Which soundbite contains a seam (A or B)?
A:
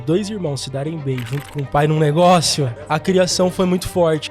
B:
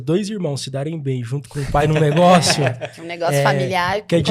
A